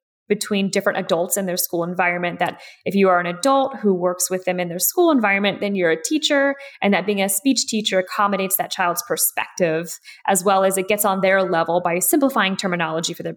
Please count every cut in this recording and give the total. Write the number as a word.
one